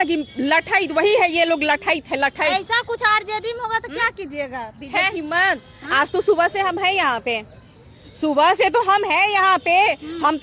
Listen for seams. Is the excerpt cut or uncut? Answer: uncut